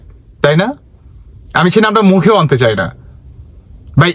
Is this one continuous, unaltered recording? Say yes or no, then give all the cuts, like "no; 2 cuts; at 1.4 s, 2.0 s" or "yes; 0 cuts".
yes; 0 cuts